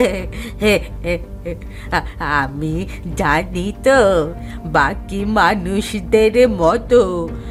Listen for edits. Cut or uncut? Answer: uncut